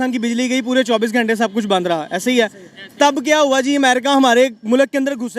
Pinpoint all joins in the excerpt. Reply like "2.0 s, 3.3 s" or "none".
none